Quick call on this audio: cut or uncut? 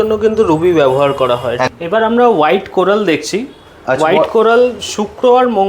cut